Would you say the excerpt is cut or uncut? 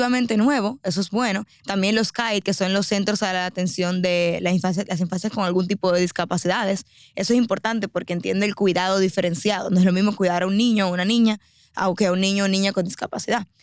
uncut